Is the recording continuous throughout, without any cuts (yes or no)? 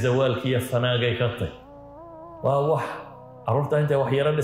yes